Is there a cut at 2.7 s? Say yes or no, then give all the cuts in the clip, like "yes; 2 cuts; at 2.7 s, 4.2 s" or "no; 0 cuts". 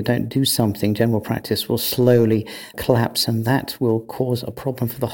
yes; 1 cut; at 2.7 s